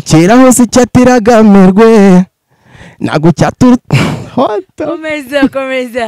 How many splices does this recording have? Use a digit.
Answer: 0